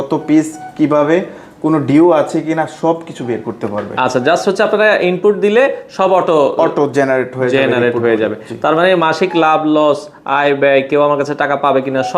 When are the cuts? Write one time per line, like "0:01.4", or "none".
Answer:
none